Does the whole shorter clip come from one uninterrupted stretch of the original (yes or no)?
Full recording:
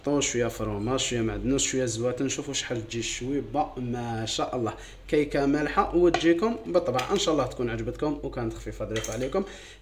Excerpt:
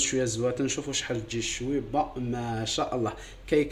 yes